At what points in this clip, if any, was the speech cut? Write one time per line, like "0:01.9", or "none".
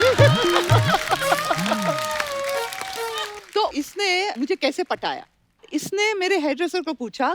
0:03.4